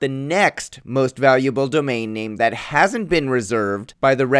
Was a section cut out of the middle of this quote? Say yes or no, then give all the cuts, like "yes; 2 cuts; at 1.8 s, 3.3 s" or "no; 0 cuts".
yes; 1 cut; at 3.5 s